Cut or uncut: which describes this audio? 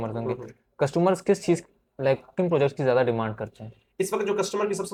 uncut